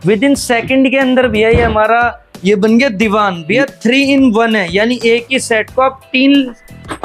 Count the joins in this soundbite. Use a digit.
0